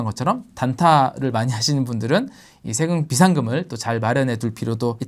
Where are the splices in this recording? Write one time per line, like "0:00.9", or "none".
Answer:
none